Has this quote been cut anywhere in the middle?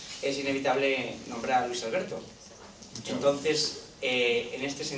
no; 0 cuts

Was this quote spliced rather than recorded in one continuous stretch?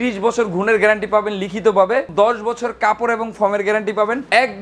no; 0 cuts

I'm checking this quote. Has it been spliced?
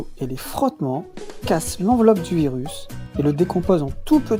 no; 0 cuts

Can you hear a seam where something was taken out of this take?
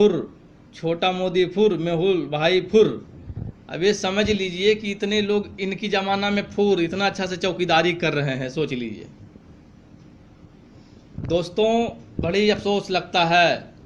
no; 0 cuts

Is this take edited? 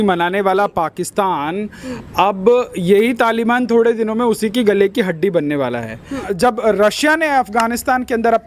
yes; 1 cut; at 6.2 s

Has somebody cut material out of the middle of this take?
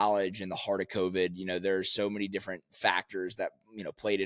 no; 0 cuts

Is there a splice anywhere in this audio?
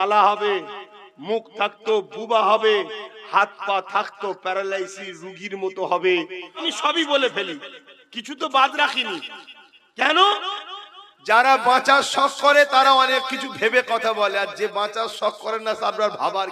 yes; 1 cut; at 6.7 s

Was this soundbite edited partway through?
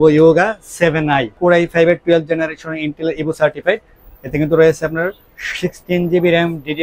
no; 0 cuts

